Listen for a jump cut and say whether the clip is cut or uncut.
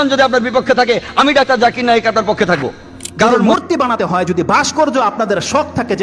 cut